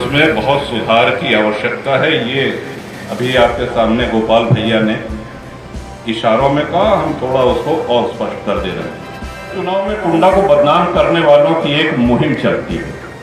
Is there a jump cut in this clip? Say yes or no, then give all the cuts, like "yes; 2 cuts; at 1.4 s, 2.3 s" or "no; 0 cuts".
yes; 1 cut; at 9.6 s